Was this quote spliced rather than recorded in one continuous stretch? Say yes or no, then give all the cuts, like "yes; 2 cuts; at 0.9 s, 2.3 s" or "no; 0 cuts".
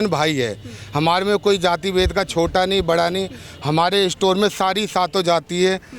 no; 0 cuts